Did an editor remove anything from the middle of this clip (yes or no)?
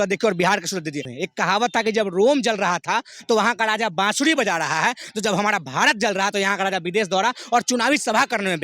yes